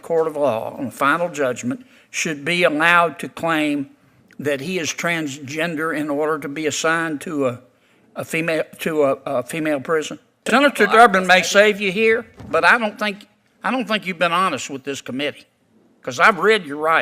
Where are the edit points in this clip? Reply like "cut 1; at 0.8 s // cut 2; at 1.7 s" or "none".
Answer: cut 1; at 10.5 s

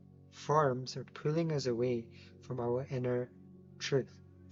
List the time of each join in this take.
none

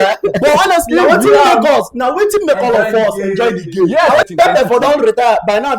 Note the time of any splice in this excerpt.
cut 1; at 4.2 s

